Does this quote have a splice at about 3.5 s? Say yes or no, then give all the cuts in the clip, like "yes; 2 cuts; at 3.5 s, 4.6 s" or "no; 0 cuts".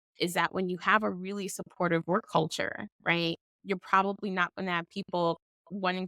yes; 2 cuts; at 2.9 s, 3.5 s